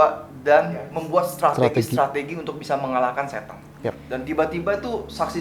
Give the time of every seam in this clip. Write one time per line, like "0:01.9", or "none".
0:00.9
0:04.0